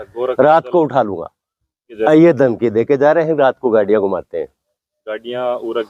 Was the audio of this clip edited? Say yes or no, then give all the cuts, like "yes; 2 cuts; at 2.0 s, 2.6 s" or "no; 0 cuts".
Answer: yes; 1 cut; at 1.9 s